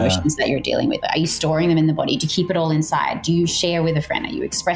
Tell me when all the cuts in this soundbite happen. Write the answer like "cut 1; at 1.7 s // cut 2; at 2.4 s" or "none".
none

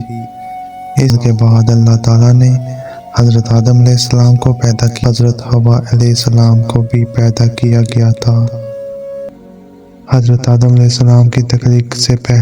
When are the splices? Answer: cut 1; at 1.1 s // cut 2; at 5.0 s // cut 3; at 9.3 s

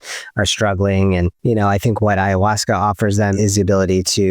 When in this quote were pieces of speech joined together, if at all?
cut 1; at 1.4 s // cut 2; at 3.3 s

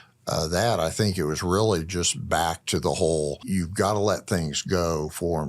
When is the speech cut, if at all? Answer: cut 1; at 3.4 s

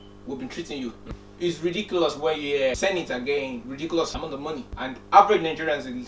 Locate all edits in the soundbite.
cut 1; at 1.1 s // cut 2; at 2.8 s // cut 3; at 4.3 s

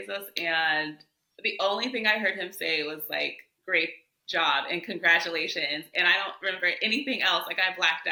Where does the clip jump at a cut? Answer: none

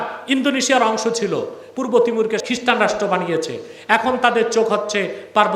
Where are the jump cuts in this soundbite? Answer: cut 1; at 1.6 s // cut 2; at 2.4 s

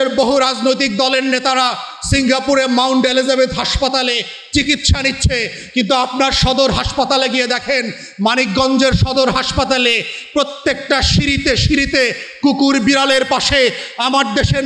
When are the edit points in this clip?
none

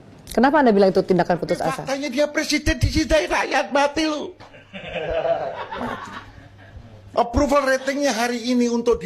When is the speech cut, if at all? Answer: cut 1; at 1.9 s

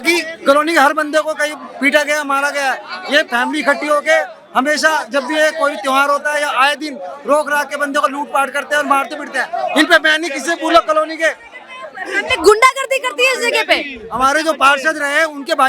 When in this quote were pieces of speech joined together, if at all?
none

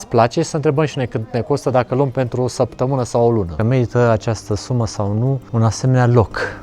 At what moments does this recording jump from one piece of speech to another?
cut 1; at 3.6 s // cut 2; at 5.4 s

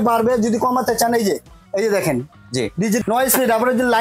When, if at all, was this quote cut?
cut 1; at 3.0 s

